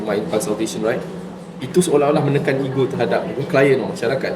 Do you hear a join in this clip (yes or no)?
yes